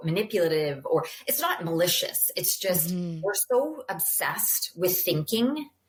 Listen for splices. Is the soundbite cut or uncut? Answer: uncut